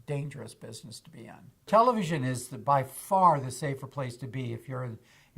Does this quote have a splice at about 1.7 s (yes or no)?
yes